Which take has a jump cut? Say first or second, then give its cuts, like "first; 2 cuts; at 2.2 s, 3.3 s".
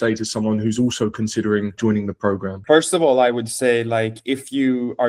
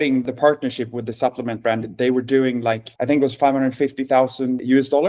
first; 1 cut; at 2.5 s